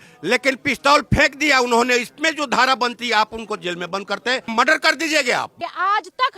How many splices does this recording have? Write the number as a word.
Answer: two